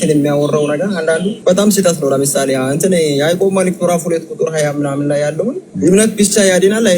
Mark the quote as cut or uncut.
cut